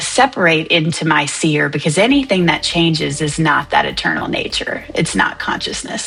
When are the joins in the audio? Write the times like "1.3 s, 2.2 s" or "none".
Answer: none